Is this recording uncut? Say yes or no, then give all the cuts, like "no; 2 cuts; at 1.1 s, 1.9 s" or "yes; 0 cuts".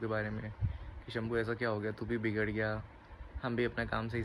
yes; 0 cuts